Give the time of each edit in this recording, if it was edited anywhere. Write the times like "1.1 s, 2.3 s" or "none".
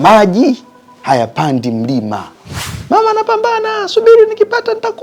2.8 s